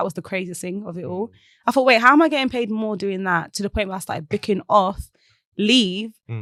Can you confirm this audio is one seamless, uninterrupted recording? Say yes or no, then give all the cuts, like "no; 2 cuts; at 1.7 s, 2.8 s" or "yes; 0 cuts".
yes; 0 cuts